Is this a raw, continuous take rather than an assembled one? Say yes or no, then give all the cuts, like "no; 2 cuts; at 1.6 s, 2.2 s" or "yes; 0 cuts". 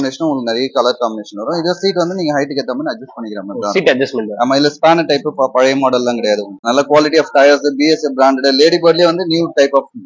no; 1 cut; at 6.6 s